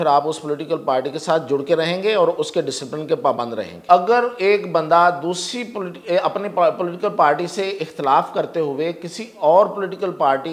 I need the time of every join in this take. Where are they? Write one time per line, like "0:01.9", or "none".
0:03.7